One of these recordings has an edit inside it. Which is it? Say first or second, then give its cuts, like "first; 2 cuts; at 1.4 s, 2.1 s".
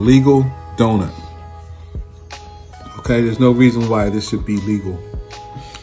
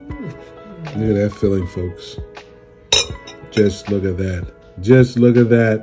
first; 2 cuts; at 1.2 s, 2.9 s